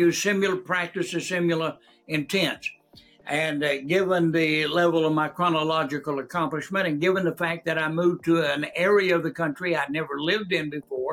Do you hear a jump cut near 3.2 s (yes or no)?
no